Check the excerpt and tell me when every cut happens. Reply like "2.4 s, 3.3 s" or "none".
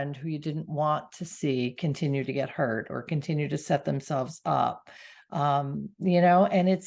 none

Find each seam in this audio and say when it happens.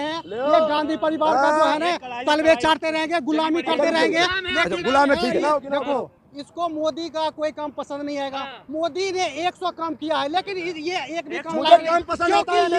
none

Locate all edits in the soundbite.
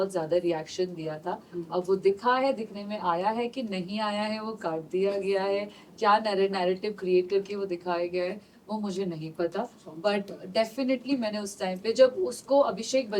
none

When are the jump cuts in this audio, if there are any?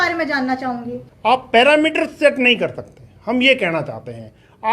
1.0 s

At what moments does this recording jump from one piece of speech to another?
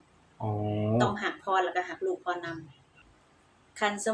3.0 s

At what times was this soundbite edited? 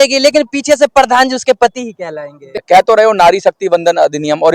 2.5 s

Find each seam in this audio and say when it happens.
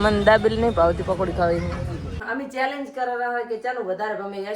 2.2 s

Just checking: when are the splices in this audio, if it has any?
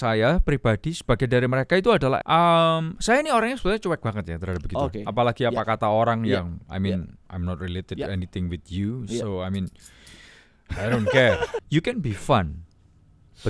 2.2 s, 11.6 s

